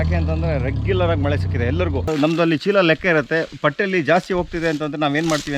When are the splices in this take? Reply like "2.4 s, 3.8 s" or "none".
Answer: 2.1 s